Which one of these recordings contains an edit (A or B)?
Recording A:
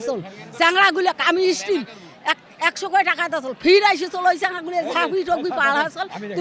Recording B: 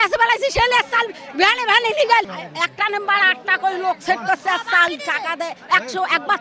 B